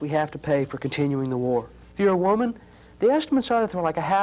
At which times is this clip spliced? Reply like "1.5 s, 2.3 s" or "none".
1.8 s